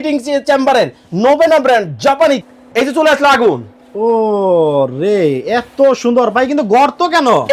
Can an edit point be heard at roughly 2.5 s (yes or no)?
yes